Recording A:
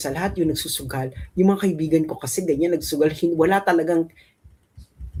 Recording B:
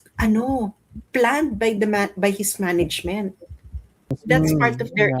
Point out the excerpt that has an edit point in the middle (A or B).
B